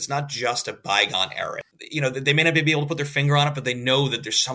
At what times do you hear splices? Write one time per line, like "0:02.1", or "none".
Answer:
0:01.6